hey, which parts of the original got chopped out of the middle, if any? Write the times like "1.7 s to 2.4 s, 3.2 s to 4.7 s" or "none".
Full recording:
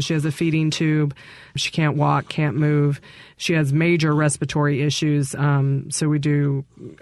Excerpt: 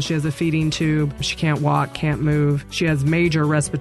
1.2 s to 1.6 s, 3.0 s to 3.3 s